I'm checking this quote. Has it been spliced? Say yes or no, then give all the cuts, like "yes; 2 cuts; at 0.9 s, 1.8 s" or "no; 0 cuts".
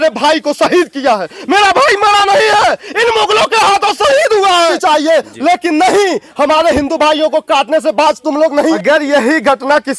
yes; 2 cuts; at 4.8 s, 8.8 s